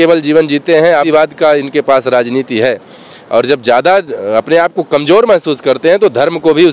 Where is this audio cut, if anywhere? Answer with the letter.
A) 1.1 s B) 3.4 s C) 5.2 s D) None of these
A